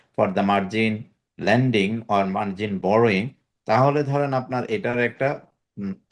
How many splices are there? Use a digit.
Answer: 0